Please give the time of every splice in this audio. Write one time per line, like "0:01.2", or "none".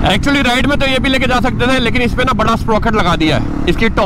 none